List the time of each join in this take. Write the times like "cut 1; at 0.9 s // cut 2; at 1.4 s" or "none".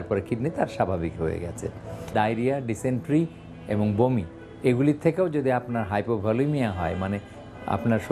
cut 1; at 2.1 s